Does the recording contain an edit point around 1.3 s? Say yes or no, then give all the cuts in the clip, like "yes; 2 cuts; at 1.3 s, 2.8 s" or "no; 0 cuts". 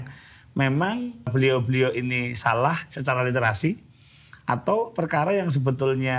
yes; 1 cut; at 1.3 s